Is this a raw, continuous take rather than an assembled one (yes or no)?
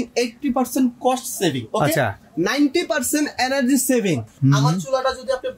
no